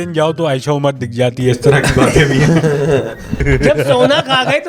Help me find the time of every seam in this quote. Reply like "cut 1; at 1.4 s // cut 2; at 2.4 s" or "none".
cut 1; at 3.4 s